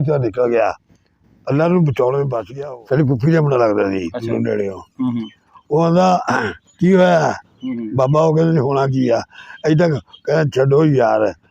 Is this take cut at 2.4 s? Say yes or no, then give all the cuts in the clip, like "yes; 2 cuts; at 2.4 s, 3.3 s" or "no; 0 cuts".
yes; 1 cut; at 2.4 s